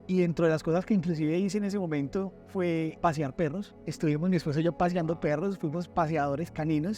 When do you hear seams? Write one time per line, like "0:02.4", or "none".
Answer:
0:02.9
0:03.8